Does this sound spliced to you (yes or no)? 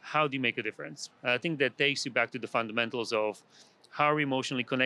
no